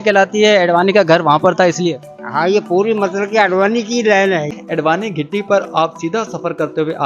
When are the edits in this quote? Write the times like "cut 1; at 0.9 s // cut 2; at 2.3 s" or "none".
cut 1; at 4.5 s